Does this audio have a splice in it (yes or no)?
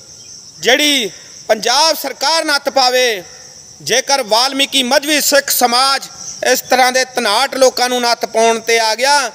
no